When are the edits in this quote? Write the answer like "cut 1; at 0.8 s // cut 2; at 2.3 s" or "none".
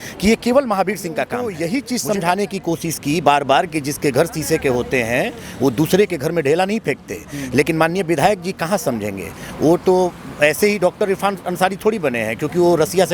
cut 1; at 1.5 s